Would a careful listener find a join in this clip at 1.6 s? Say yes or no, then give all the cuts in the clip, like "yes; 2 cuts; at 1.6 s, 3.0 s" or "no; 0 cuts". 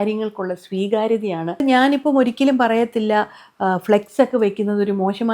yes; 1 cut; at 1.6 s